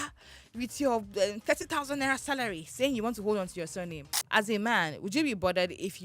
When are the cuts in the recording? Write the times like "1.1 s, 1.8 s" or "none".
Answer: 4.1 s